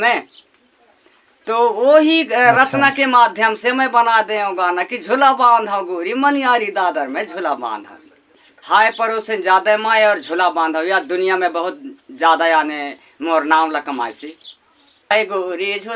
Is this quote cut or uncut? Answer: cut